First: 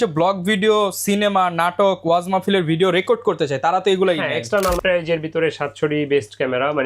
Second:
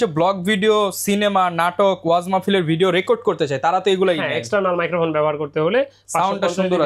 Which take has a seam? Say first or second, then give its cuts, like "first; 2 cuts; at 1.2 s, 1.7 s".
first; 1 cut; at 4.8 s